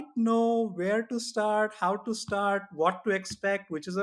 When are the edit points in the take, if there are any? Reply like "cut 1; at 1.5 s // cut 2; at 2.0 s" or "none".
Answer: none